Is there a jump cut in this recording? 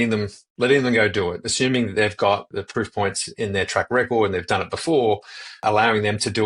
yes; 2 cuts; at 2.5 s, 5.6 s

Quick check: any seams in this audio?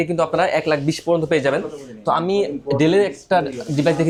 no; 0 cuts

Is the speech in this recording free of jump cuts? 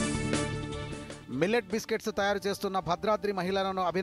no; 1 cut; at 0.9 s

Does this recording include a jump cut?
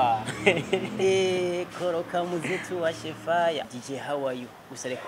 yes; 1 cut; at 3.6 s

